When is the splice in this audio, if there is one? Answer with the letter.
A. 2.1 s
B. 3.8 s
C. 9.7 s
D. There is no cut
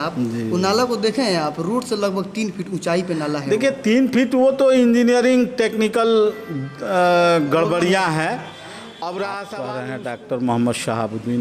C